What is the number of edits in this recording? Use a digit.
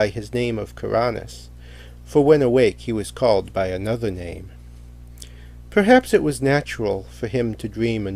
1